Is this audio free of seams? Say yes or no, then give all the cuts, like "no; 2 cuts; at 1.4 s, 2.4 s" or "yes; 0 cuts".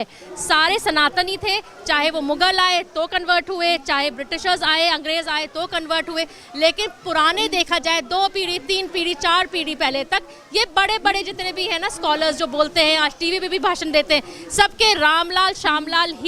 yes; 0 cuts